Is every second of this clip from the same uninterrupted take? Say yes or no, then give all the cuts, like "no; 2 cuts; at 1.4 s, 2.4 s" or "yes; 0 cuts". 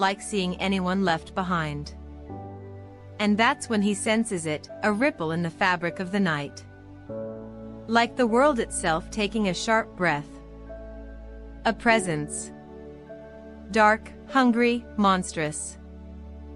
no; 2 cuts; at 6.5 s, 7.8 s